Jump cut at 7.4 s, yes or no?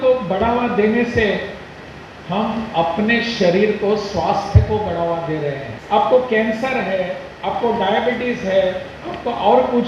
no